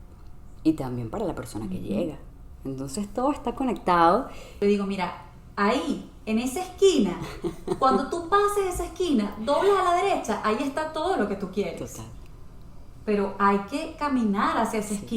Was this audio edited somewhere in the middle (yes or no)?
yes